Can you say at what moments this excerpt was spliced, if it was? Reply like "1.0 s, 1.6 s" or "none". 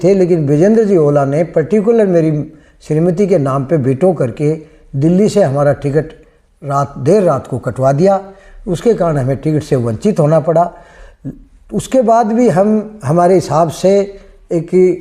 none